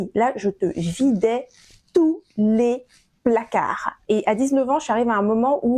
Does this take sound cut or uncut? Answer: cut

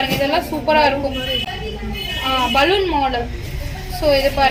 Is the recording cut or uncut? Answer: uncut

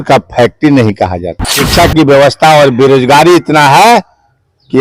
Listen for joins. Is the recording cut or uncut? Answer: cut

